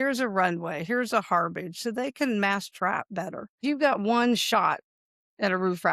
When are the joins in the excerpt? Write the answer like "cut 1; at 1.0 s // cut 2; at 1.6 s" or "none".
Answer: cut 1; at 3.6 s